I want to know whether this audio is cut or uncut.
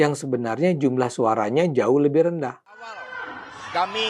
cut